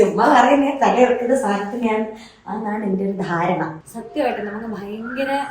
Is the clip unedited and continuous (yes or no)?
no